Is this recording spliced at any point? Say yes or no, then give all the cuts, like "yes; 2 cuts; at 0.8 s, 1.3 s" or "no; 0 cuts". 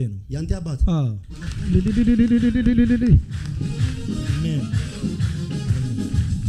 no; 0 cuts